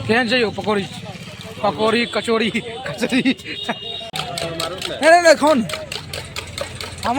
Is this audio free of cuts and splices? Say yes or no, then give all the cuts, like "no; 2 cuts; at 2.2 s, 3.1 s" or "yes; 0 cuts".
no; 1 cut; at 4.3 s